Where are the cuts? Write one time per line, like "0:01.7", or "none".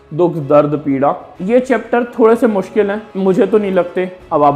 0:01.3
0:03.0